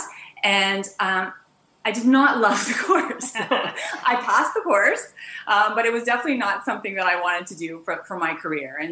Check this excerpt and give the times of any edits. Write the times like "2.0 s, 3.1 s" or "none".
none